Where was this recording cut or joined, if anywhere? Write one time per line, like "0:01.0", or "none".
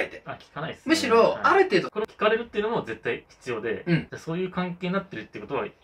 0:02.0
0:04.1

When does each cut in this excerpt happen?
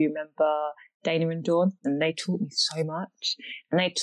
0:01.8

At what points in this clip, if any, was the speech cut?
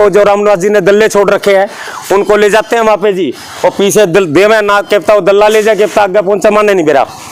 none

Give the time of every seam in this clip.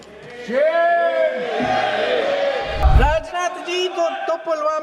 0:02.8

